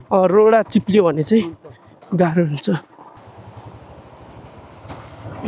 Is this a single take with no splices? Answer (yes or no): no